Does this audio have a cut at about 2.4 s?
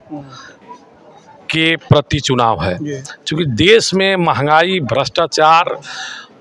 no; 0 cuts

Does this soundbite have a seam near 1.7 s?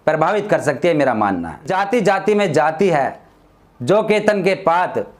yes; 1 cut; at 1.7 s

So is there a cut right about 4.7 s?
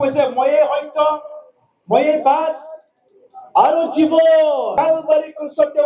yes; 1 cut; at 4.7 s

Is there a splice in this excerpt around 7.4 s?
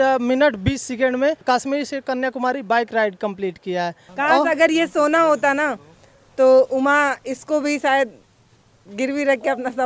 no; 2 cuts; at 1.4 s, 4.0 s

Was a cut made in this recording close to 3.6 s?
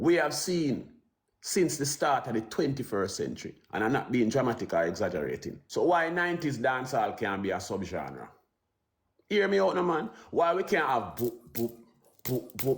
no; 1 cut; at 5.5 s

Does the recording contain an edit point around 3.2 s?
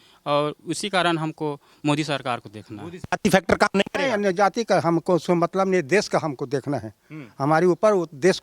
yes; 1 cut; at 3.2 s

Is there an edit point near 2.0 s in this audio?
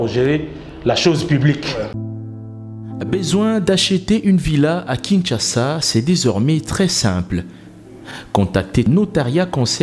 yes; 1 cut; at 2.0 s

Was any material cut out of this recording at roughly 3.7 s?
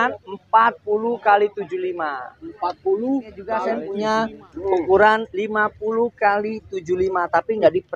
yes; 1 cut; at 3.7 s

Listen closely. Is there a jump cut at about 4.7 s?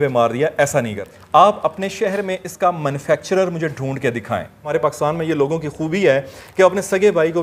yes; 2 cuts; at 1.1 s, 4.7 s

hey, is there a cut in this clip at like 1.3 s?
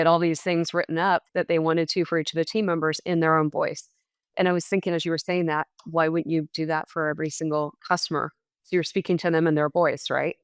yes; 1 cut; at 1.3 s

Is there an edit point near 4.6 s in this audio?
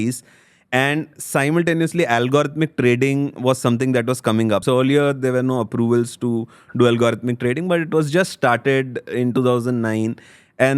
yes; 1 cut; at 4.6 s

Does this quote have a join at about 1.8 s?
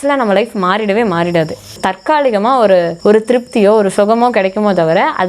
yes; 2 cuts; at 1.8 s, 2.9 s

